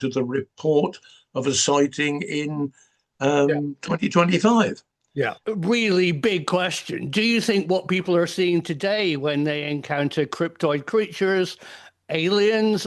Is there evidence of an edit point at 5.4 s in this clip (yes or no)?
yes